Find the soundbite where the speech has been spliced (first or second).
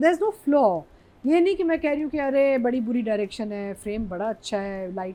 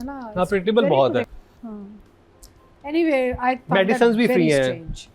second